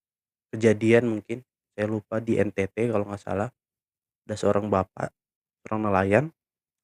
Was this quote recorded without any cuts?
no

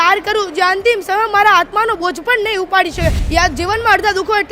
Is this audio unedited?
no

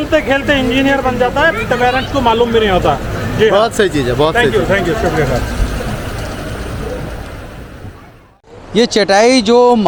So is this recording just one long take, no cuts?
yes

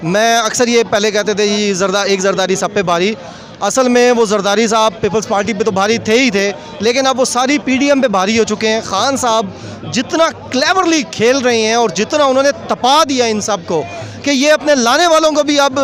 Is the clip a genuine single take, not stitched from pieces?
yes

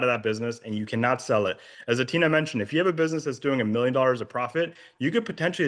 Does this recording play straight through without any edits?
yes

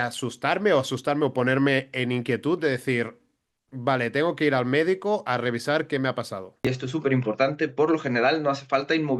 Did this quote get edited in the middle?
yes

